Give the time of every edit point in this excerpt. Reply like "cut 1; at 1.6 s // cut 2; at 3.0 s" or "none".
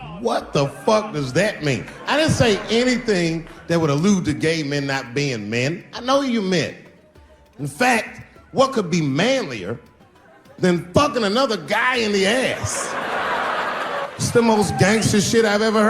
cut 1; at 14.1 s